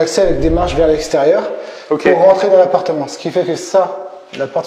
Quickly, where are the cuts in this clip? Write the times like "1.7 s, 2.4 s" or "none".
none

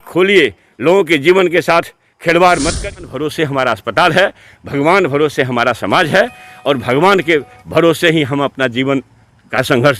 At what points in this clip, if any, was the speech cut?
3.0 s

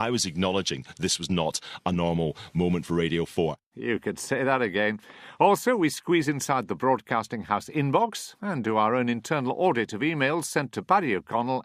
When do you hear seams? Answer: 3.5 s, 9.4 s

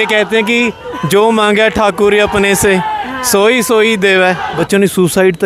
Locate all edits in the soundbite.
4.5 s

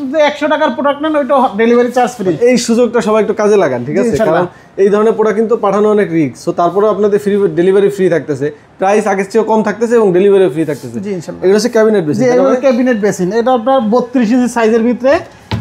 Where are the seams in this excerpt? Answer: none

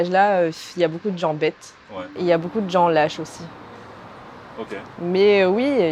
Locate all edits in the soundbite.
none

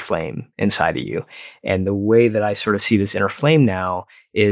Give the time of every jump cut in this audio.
none

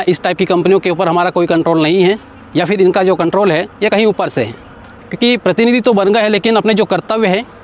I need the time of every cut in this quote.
4.9 s

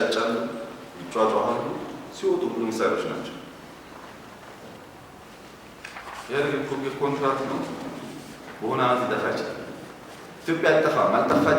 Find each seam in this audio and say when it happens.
5.2 s

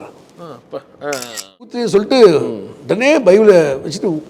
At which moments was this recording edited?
1.8 s

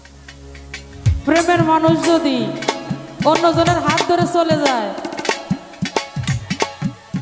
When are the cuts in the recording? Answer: none

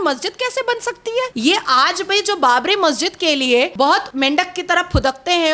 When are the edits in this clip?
1.3 s, 4.0 s

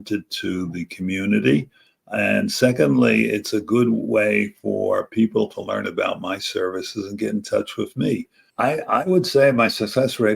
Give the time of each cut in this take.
8.4 s

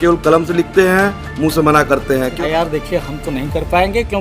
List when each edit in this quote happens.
2.3 s

